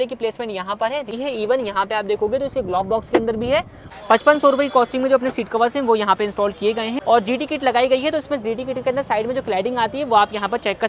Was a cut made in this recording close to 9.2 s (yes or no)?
no